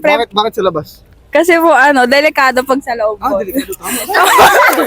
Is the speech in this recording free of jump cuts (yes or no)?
no